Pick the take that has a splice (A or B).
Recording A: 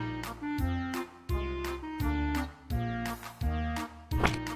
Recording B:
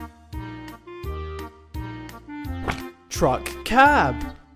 A